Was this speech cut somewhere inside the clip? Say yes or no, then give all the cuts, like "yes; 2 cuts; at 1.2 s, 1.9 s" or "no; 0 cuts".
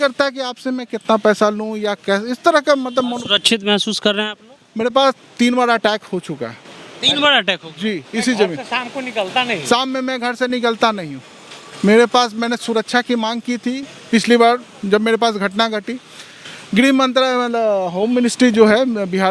no; 0 cuts